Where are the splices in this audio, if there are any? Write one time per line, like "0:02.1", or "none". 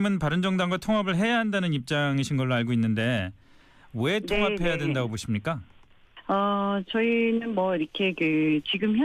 none